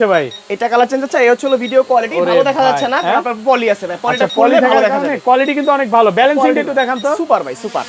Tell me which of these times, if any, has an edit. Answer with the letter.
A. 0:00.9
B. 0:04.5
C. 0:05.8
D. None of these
D